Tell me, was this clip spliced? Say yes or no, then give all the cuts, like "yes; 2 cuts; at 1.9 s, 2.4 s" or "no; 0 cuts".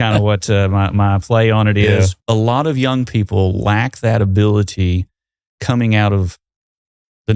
yes; 1 cut; at 2.1 s